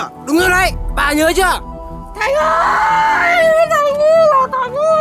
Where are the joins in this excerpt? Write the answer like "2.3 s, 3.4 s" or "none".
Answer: none